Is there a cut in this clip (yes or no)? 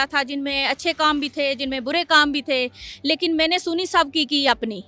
no